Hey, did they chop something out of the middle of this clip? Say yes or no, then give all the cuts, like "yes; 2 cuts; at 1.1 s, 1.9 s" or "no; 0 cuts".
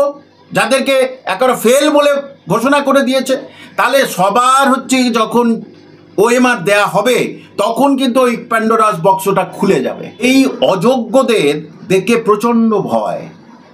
yes; 1 cut; at 10.2 s